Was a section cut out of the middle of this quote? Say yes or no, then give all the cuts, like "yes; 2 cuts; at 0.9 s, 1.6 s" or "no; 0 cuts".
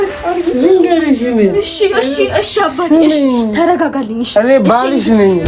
no; 0 cuts